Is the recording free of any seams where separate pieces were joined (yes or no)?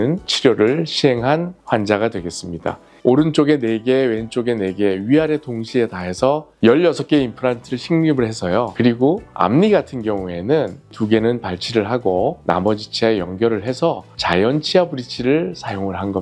no